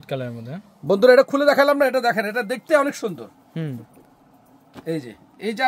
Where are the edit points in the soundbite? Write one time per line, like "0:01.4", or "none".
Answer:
none